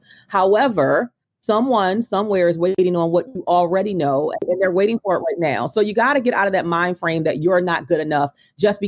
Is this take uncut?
no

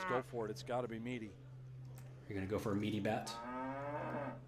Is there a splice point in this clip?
yes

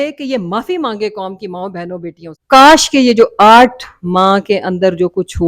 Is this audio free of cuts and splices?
no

